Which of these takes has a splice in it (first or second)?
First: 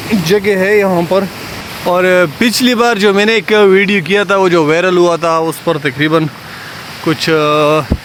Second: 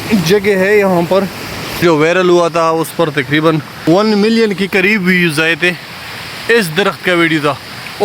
second